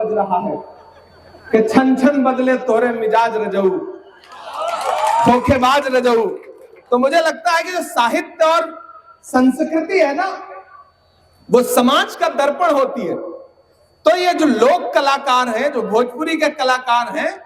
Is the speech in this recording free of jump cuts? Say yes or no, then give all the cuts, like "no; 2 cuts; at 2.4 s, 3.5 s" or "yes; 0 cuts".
yes; 0 cuts